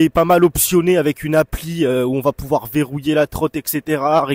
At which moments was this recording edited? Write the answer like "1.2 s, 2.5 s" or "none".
none